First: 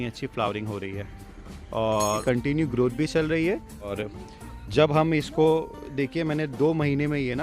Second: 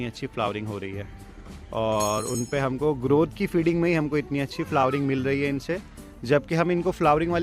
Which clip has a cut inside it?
first; 2 cuts; at 2.2 s, 4.0 s

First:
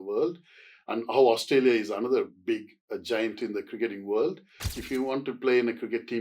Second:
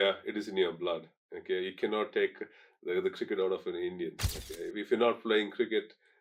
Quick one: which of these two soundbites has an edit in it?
first; 1 cut; at 4.8 s

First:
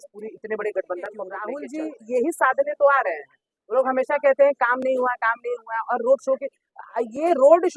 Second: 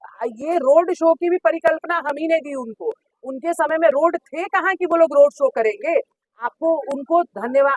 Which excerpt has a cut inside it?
first; 1 cut; at 1.6 s

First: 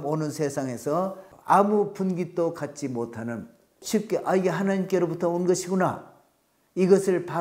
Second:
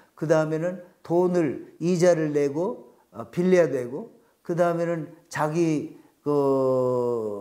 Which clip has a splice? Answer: first; 2 cuts; at 1.3 s, 3.8 s

